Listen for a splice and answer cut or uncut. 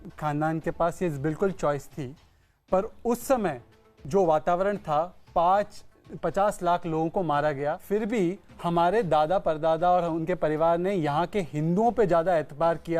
cut